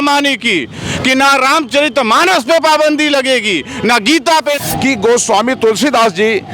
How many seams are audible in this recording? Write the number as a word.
one